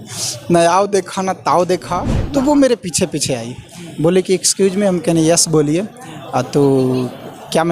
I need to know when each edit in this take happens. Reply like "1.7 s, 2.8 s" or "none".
2.1 s